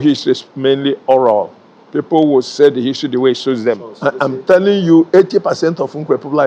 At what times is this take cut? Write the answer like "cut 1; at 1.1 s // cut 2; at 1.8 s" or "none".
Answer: cut 1; at 3.9 s

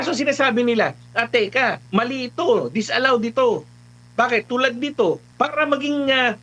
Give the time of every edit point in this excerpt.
cut 1; at 1.8 s // cut 2; at 5.3 s

